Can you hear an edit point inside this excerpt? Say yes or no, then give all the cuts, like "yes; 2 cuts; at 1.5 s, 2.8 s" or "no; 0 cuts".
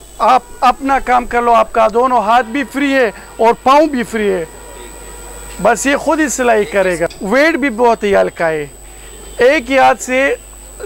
yes; 1 cut; at 7.1 s